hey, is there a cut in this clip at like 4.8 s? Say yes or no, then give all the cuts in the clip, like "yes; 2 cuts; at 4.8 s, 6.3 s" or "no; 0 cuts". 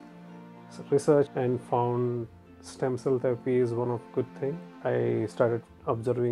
yes; 2 cuts; at 1.3 s, 4.8 s